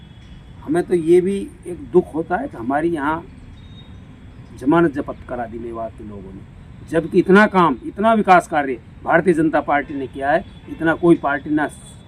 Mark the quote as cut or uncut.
uncut